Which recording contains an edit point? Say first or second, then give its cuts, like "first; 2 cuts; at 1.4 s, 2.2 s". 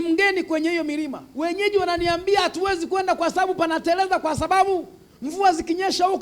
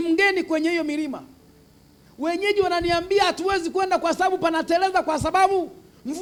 first; 1 cut; at 1.2 s